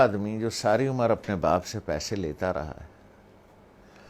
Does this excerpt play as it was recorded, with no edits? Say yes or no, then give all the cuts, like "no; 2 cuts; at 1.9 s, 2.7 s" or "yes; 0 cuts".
yes; 0 cuts